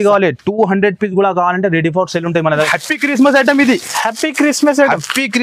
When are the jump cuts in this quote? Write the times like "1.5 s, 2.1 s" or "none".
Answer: 2.7 s